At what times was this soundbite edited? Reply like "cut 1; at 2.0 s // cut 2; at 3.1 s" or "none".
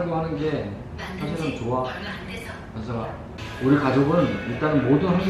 none

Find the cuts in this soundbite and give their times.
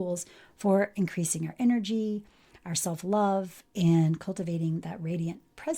none

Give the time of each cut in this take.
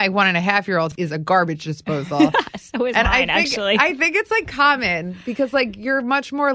cut 1; at 0.9 s

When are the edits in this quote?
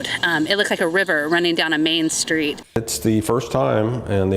cut 1; at 2.6 s

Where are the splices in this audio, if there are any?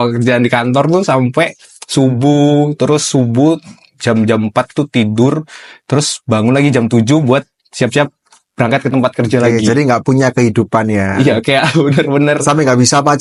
none

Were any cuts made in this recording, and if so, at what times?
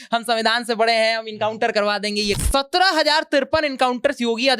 cut 1; at 2.4 s

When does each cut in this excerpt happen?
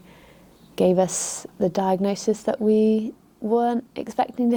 none

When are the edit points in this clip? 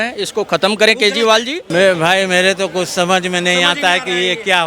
cut 1; at 1.6 s

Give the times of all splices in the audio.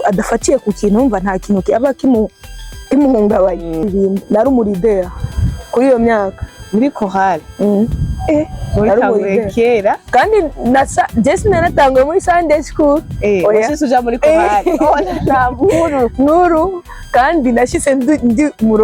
cut 1; at 3.8 s

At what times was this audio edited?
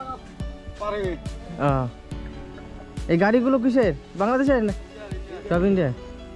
none

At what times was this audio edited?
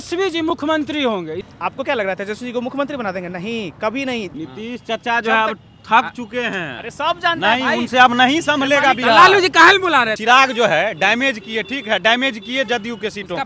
cut 1; at 1.4 s // cut 2; at 4.3 s // cut 3; at 10.1 s

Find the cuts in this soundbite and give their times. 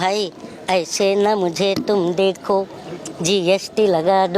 none

